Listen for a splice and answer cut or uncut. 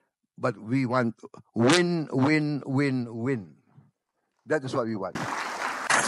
cut